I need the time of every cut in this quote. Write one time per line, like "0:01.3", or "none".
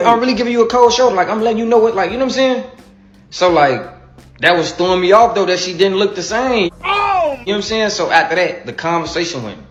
none